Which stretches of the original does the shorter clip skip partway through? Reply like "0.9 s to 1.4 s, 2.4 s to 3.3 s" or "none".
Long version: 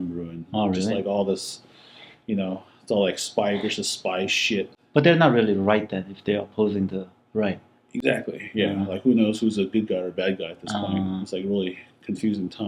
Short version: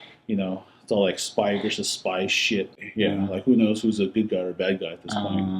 4.8 s to 8.4 s